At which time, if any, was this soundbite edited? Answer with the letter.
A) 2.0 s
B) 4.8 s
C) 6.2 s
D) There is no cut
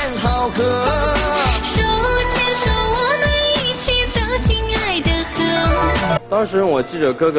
C